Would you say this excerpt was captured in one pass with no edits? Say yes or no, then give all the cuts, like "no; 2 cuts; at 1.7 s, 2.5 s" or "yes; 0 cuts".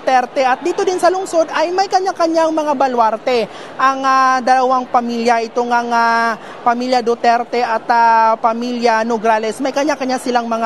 no; 2 cuts; at 1.9 s, 3.4 s